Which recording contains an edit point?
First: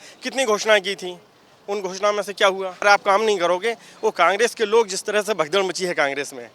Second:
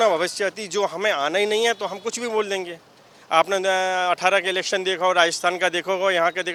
first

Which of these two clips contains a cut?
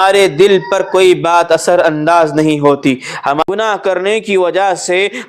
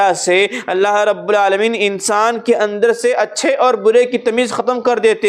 first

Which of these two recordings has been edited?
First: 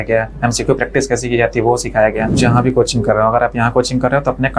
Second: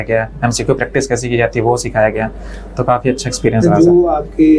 first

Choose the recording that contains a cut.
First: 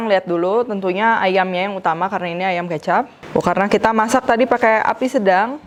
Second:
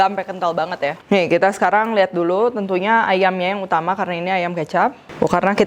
second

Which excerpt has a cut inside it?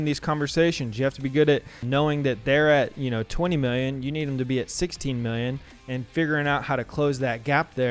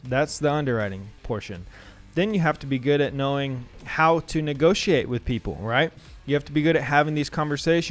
second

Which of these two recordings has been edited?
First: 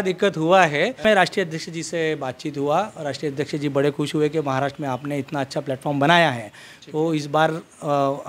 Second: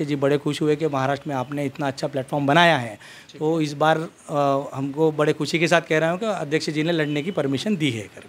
first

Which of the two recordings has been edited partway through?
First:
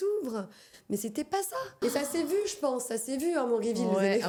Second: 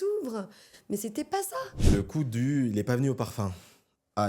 second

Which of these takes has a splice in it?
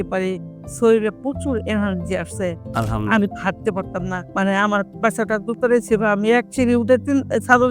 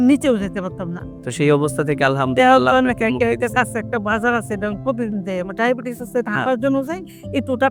first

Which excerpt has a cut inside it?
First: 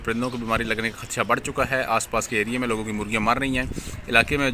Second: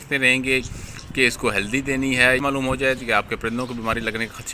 second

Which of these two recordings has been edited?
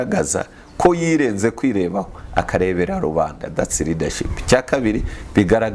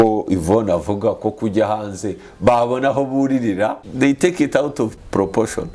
second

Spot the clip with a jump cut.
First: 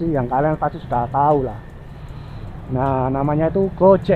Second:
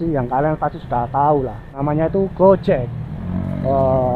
second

